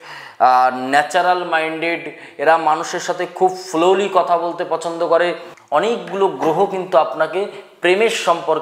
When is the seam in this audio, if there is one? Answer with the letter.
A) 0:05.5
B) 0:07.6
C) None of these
A